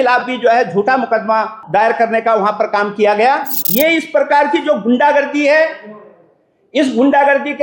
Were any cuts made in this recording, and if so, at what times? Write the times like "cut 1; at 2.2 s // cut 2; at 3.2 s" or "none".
cut 1; at 1.6 s // cut 2; at 3.6 s